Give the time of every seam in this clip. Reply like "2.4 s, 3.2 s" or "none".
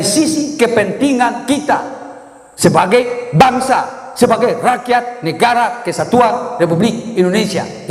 none